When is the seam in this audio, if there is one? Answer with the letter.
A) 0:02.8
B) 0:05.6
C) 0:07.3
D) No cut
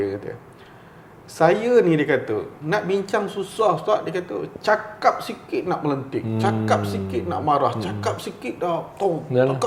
D